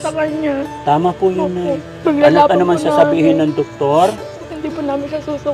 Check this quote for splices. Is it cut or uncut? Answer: cut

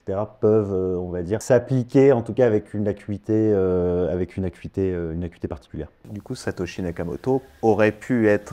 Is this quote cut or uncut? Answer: cut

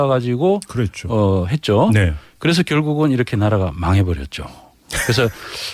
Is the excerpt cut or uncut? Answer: uncut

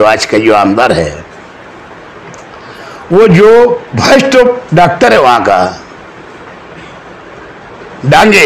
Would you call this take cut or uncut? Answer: uncut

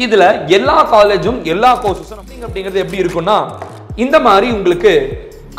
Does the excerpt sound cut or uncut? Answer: cut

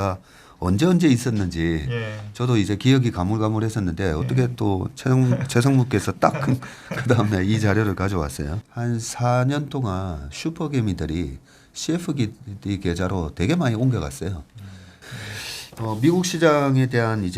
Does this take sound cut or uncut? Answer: cut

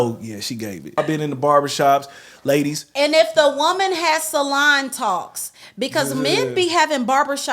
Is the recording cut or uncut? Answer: cut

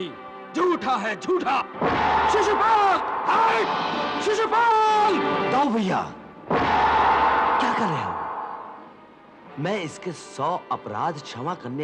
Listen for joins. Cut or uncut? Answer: uncut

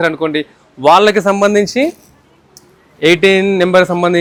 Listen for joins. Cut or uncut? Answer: uncut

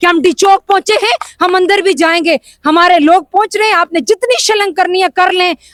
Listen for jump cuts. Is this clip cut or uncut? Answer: uncut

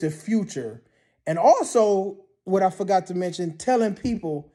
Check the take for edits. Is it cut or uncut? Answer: uncut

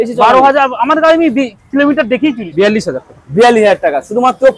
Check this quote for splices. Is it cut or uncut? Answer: cut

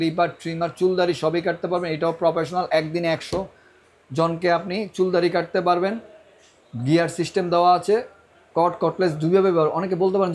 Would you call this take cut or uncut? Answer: uncut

